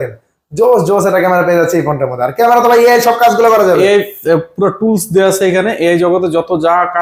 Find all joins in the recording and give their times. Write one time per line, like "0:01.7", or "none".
none